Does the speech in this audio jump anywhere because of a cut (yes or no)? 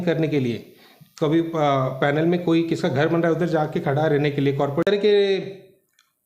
yes